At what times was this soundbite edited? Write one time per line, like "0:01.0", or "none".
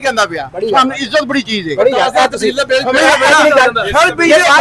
none